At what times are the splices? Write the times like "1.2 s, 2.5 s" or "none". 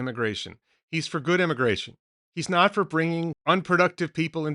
3.4 s